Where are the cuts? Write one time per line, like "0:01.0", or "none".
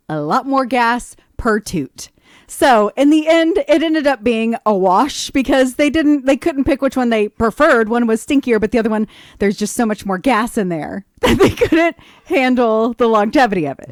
none